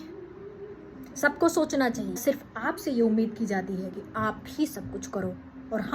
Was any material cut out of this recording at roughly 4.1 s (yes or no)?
no